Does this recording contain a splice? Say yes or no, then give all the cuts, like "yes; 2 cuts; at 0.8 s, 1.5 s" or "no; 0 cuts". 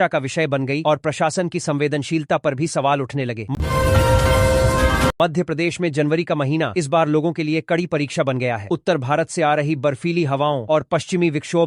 yes; 2 cuts; at 3.5 s, 5.1 s